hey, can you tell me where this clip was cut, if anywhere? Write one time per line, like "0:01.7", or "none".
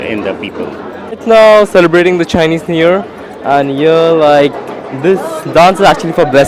0:01.2